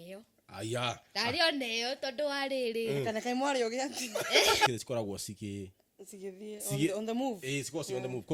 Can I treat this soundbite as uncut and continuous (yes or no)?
no